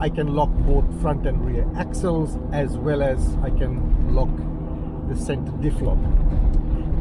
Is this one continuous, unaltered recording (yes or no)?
yes